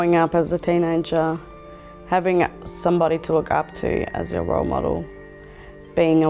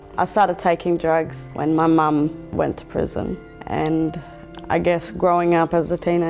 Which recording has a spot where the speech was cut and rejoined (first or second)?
second